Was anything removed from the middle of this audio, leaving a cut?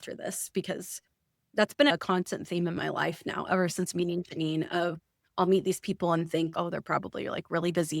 yes; 1 cut; at 1.9 s

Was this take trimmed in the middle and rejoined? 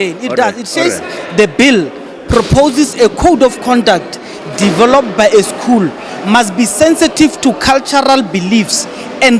no; 0 cuts

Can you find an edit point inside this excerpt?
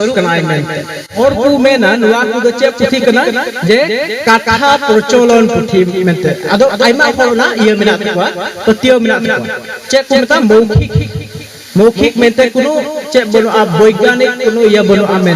yes; 1 cut; at 1.2 s

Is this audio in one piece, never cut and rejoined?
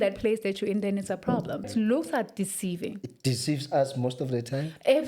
no; 1 cut; at 1.7 s

